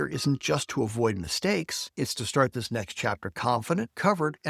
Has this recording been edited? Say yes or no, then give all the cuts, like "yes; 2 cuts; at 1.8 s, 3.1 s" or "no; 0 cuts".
no; 0 cuts